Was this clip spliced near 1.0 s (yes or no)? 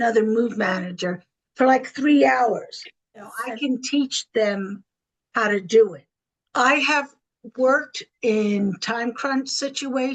no